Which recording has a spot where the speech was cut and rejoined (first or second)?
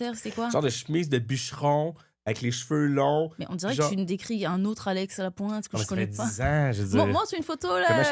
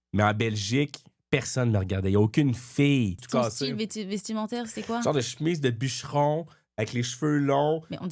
second